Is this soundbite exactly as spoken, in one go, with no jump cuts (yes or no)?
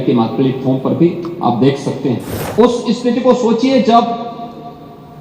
no